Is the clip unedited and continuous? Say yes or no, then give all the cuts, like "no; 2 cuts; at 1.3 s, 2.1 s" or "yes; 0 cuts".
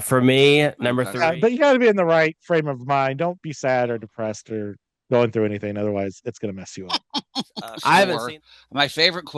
no; 2 cuts; at 1.1 s, 8.2 s